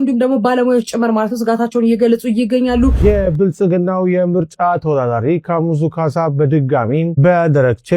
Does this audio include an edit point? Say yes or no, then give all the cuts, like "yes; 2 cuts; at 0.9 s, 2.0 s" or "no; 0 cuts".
yes; 1 cut; at 3.0 s